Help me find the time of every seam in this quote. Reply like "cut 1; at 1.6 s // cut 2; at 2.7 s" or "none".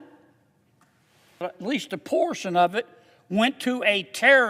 cut 1; at 1.4 s